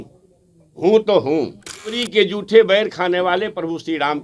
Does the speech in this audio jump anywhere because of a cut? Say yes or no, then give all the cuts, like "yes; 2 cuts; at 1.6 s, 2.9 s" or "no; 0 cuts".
yes; 1 cut; at 2.0 s